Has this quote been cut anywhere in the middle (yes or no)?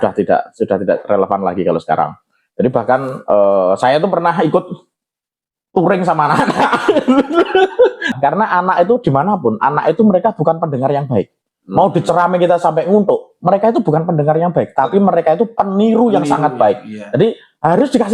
yes